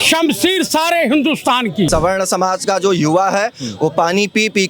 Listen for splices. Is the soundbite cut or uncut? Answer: cut